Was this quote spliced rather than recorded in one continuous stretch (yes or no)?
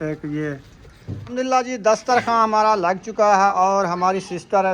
yes